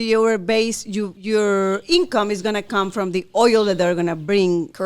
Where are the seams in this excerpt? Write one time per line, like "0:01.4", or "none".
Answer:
0:01.2